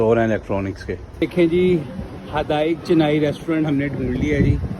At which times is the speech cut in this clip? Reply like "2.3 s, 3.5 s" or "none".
1.2 s